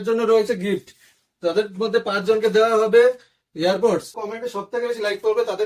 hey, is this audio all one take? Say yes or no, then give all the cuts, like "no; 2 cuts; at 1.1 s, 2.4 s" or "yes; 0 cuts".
no; 1 cut; at 4.2 s